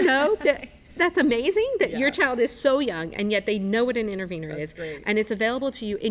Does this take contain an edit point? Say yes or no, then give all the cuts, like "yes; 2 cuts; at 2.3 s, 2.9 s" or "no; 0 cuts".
no; 0 cuts